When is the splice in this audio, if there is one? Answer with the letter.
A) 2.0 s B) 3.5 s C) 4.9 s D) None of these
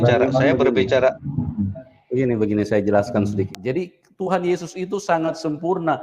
B